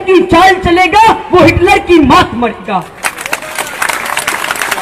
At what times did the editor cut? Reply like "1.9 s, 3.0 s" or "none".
none